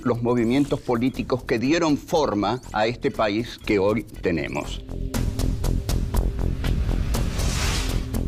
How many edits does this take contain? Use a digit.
1